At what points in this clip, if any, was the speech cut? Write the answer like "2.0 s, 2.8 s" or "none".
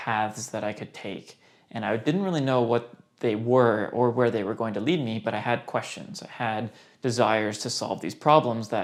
none